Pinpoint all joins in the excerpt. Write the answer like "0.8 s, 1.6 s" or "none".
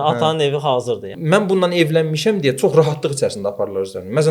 1.1 s